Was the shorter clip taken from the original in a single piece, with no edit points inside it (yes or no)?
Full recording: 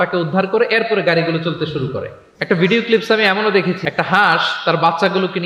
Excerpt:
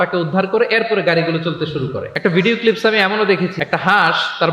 no